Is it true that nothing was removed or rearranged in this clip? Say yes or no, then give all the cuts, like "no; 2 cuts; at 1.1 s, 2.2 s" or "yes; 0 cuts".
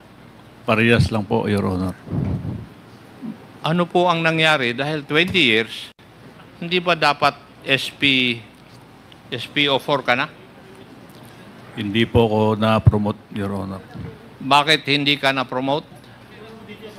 yes; 0 cuts